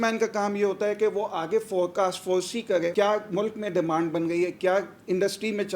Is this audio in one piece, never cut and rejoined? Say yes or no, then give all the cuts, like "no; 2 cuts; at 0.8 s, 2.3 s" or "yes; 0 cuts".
no; 1 cut; at 2.9 s